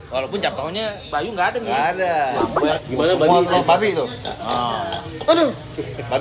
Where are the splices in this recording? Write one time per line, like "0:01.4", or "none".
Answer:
0:02.5